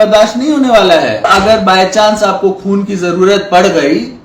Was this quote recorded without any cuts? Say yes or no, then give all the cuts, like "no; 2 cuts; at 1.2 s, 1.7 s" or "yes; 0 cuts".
no; 1 cut; at 1.3 s